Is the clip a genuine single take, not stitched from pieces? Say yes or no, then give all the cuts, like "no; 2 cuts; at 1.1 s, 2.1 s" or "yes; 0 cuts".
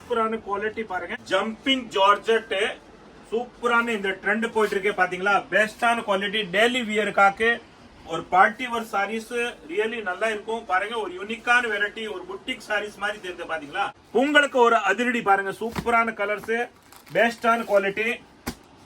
no; 2 cuts; at 1.1 s, 14.0 s